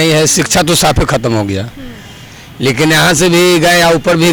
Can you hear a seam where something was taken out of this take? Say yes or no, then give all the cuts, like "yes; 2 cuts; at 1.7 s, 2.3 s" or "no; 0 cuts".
no; 0 cuts